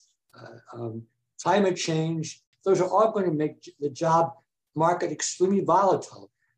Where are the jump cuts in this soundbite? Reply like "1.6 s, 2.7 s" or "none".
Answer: 2.5 s